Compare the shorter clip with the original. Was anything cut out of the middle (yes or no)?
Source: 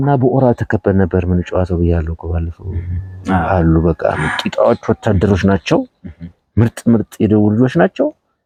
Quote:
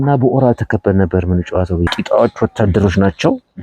yes